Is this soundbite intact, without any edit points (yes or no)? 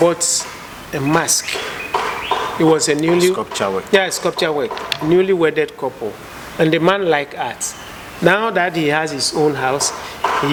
yes